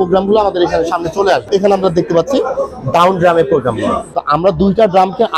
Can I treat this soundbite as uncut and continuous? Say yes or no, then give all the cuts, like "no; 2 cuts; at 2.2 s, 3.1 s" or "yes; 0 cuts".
no; 2 cuts; at 1.4 s, 4.1 s